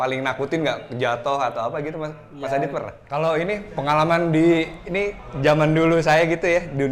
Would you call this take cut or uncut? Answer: cut